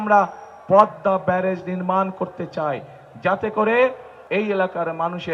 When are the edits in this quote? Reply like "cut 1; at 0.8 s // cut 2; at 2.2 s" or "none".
cut 1; at 4.1 s